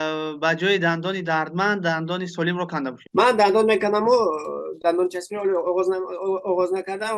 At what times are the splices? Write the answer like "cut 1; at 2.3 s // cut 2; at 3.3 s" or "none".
cut 1; at 3.0 s